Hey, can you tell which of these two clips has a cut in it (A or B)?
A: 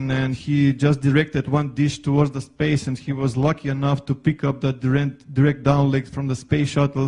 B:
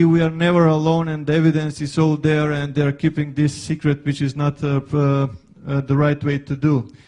A